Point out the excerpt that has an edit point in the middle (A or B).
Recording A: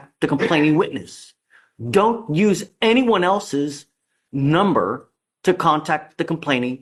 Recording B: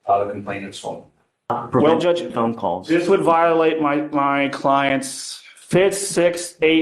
B